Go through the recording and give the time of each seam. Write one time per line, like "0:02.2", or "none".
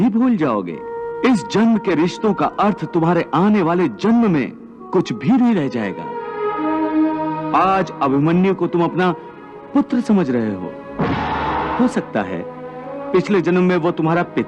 0:00.9
0:11.7